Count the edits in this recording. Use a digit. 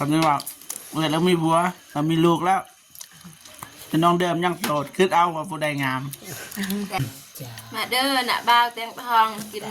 1